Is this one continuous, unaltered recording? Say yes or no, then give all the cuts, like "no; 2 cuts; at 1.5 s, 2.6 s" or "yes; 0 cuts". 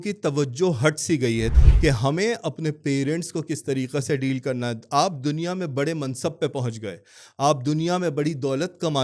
no; 1 cut; at 1.5 s